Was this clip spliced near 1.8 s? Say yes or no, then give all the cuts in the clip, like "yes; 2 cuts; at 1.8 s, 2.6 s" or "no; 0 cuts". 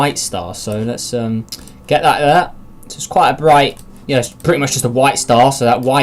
no; 1 cut; at 4.7 s